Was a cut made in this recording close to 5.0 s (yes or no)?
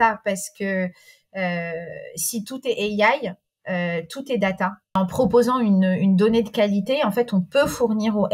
yes